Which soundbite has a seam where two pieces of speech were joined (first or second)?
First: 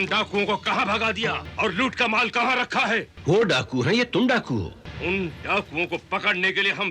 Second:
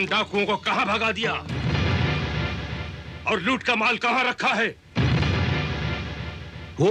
first